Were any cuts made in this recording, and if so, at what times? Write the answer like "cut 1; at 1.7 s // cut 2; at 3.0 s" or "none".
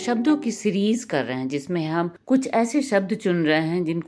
cut 1; at 2.2 s